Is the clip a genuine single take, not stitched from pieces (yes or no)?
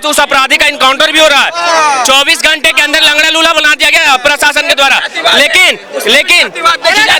yes